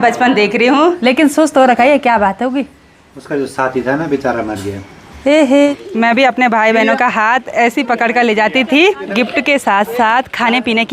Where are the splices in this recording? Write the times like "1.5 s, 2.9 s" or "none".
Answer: 1.0 s, 5.7 s, 9.0 s